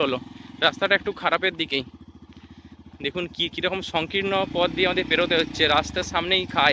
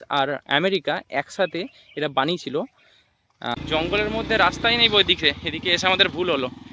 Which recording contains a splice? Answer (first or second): second